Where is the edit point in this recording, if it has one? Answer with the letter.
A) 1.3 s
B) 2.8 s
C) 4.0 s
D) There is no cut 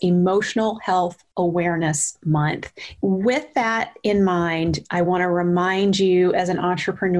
D